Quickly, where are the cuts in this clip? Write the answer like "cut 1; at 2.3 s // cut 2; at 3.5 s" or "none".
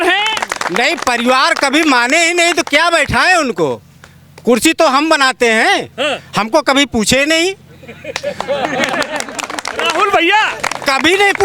none